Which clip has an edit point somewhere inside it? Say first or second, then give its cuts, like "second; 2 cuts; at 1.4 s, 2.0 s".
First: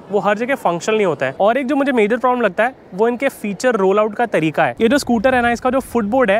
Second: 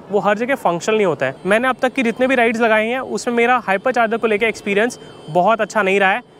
first; 2 cuts; at 1.3 s, 4.7 s